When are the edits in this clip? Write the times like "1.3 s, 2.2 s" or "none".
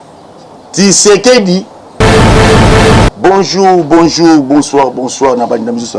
none